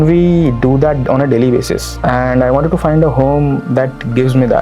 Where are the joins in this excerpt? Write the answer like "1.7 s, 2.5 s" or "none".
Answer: 1.9 s